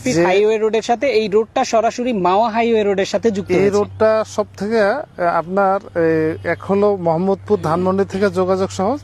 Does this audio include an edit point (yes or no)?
no